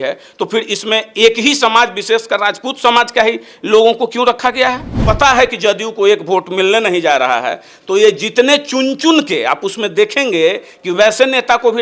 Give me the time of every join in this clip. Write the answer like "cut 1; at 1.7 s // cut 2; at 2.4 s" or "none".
cut 1; at 4.9 s